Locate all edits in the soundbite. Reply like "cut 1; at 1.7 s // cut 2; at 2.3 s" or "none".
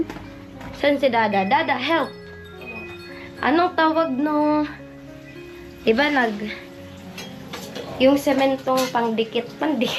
none